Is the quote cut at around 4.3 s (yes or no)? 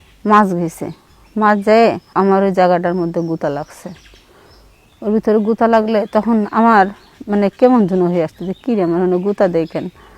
no